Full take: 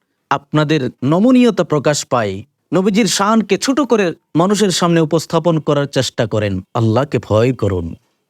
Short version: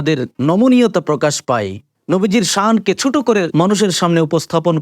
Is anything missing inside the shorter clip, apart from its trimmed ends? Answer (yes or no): yes